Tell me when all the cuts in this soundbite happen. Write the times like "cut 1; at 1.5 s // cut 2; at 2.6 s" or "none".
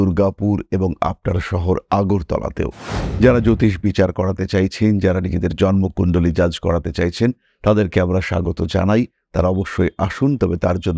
none